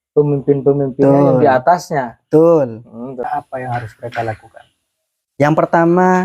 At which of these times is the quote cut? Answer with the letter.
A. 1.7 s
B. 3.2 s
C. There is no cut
B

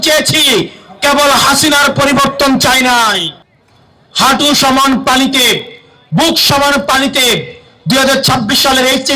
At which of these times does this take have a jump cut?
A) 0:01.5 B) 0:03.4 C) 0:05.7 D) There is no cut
B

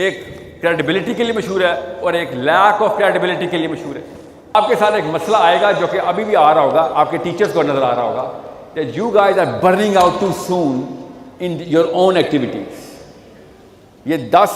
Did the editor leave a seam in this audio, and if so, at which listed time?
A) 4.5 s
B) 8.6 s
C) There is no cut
A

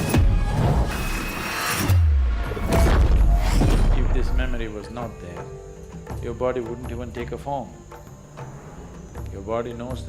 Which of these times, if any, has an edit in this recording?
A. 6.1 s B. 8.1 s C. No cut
B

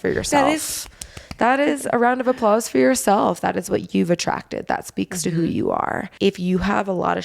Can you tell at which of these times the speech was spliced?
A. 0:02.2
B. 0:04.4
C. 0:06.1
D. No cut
C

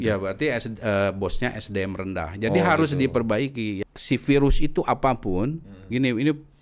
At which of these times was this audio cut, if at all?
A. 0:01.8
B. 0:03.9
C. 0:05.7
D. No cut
B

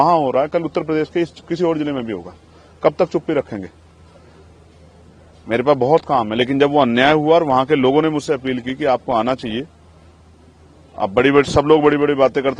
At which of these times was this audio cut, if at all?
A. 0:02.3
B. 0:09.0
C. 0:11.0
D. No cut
D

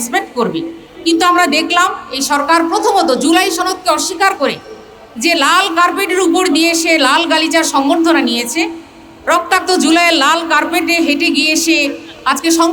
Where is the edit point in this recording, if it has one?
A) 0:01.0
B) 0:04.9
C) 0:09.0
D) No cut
D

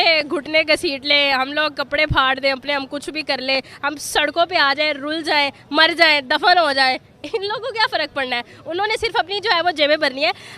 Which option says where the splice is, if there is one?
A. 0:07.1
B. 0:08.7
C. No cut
C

